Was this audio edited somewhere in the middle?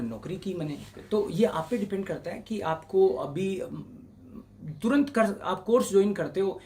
no; 0 cuts

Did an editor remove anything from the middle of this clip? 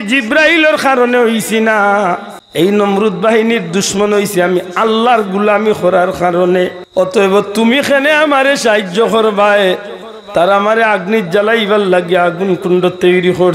no; 0 cuts

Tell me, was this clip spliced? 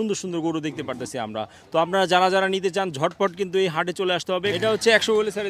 yes; 1 cut; at 4.5 s

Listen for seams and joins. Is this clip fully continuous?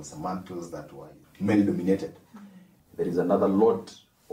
no; 2 cuts; at 1.2 s, 2.8 s

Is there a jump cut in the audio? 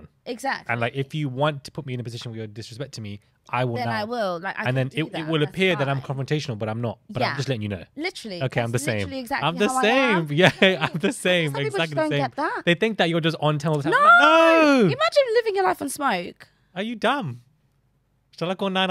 no; 0 cuts

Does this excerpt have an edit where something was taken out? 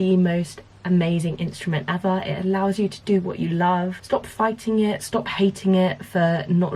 yes; 1 cut; at 4.0 s

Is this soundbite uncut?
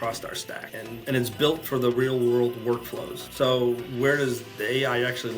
no; 1 cut; at 1.0 s

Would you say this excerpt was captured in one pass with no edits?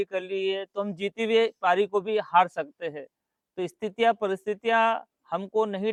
yes; 0 cuts

